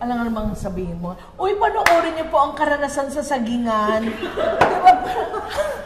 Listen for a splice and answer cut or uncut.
uncut